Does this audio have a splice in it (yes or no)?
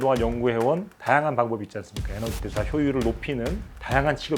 no